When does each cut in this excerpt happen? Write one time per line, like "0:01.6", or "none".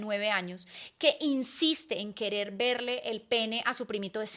none